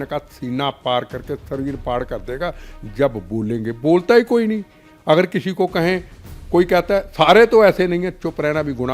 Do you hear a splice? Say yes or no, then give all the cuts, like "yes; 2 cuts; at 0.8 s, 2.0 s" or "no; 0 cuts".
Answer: no; 0 cuts